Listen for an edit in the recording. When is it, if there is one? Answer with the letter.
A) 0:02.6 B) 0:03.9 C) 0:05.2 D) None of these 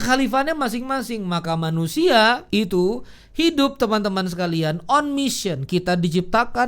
A